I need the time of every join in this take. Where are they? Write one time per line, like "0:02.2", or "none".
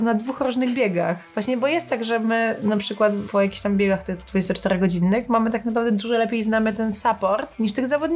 0:01.3
0:03.3